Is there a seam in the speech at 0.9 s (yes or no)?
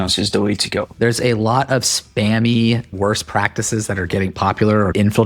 yes